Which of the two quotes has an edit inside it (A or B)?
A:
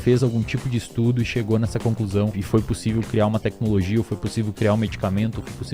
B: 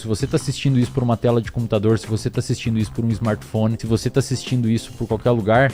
A